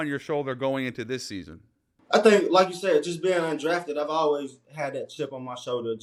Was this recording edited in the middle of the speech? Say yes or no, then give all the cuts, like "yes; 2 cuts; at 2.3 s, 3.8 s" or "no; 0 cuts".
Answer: no; 0 cuts